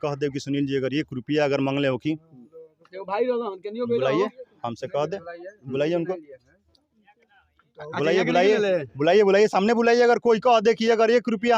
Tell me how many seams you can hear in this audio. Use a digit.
0